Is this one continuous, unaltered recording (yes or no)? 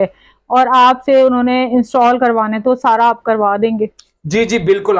yes